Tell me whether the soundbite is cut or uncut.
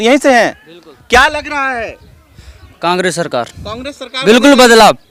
uncut